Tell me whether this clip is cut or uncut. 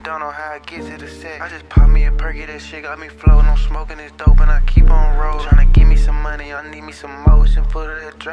uncut